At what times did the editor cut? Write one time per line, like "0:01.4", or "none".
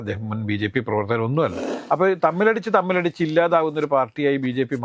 0:01.7